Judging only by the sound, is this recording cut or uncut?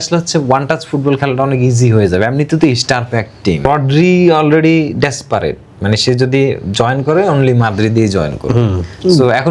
cut